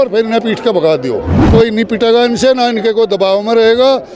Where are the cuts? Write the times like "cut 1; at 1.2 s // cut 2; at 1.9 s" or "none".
cut 1; at 1.4 s